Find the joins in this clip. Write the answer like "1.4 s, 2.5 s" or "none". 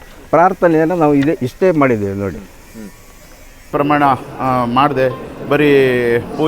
3.7 s